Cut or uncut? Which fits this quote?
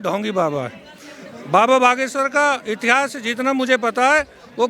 uncut